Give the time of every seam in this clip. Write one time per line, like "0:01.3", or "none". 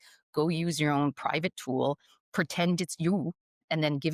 none